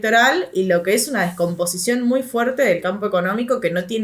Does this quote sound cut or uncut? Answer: uncut